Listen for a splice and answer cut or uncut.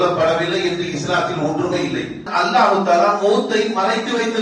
cut